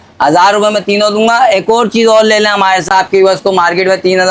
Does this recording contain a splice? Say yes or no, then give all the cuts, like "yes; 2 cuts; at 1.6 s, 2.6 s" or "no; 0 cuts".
yes; 1 cut; at 2.9 s